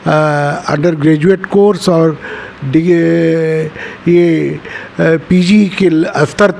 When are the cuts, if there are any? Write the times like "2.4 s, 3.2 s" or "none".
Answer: none